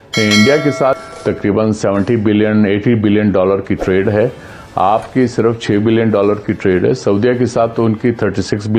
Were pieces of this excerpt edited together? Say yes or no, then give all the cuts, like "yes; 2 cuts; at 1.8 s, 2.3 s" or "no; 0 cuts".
yes; 1 cut; at 1.0 s